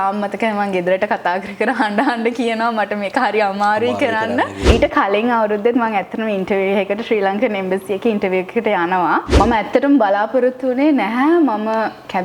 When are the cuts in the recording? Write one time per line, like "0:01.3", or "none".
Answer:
0:04.7
0:09.3